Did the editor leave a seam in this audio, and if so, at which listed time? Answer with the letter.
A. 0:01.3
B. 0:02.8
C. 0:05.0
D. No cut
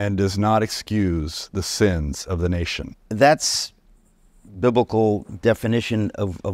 B